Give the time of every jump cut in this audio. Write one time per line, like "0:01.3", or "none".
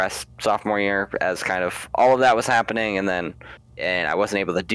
0:03.8